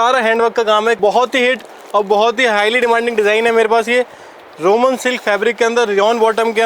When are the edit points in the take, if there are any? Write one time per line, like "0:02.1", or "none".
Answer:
0:01.0